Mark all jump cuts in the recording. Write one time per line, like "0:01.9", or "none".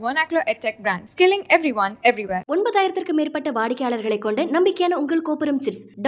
none